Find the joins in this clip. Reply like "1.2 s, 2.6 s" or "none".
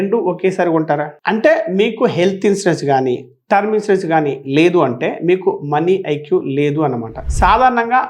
1.1 s, 7.1 s